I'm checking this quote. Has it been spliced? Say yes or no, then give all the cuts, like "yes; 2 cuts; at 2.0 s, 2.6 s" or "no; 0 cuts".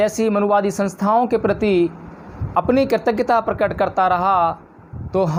no; 0 cuts